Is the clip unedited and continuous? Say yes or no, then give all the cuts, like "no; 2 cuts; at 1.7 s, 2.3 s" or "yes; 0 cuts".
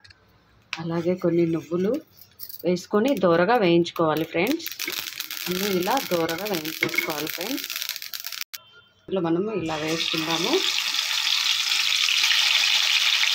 no; 1 cut; at 9.1 s